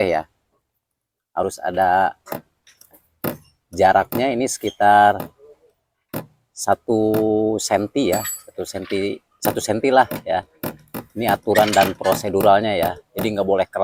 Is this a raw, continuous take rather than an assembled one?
yes; 0 cuts

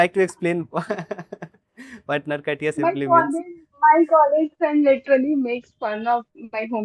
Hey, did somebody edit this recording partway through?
no; 0 cuts

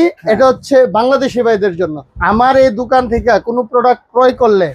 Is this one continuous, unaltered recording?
no; 1 cut; at 2.0 s

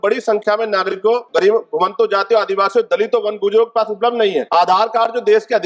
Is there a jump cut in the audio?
yes; 2 cuts; at 1.3 s, 4.5 s

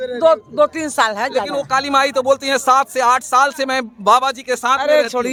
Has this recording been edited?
no; 0 cuts

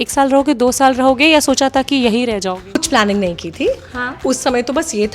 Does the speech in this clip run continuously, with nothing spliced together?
no; 1 cut; at 2.8 s

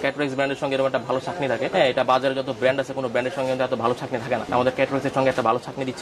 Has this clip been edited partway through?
no; 0 cuts

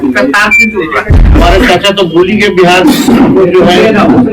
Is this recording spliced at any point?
yes; 1 cut; at 1.2 s

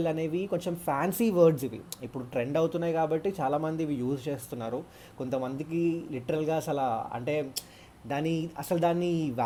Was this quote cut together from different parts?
no; 0 cuts

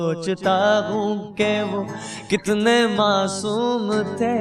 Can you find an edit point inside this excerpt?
no; 0 cuts

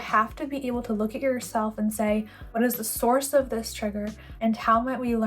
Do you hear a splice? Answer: yes; 2 cuts; at 2.4 s, 4.2 s

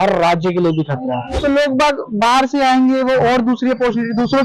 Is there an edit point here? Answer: yes; 1 cut; at 1.3 s

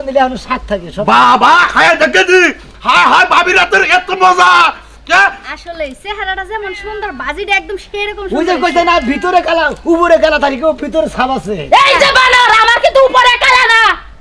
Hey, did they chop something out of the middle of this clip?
no; 0 cuts

